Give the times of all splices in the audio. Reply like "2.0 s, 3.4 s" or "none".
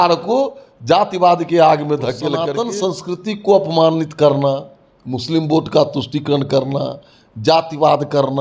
2.3 s